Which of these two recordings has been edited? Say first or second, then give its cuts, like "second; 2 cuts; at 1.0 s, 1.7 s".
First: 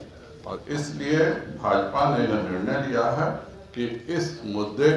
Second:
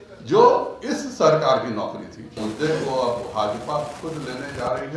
second; 1 cut; at 2.4 s